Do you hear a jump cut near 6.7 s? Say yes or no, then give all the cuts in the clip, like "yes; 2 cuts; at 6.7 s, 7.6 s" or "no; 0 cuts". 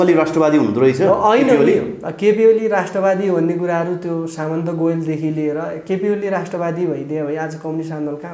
no; 0 cuts